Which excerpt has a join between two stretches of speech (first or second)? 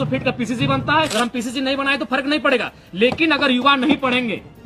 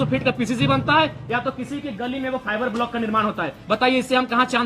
first